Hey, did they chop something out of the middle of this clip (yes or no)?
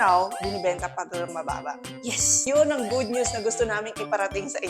yes